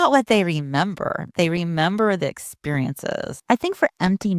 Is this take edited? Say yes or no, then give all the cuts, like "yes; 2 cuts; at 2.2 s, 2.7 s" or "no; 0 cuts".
yes; 1 cut; at 3.3 s